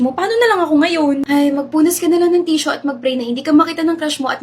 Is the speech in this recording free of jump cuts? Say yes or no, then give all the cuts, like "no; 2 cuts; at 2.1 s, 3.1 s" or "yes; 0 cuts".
no; 1 cut; at 1.2 s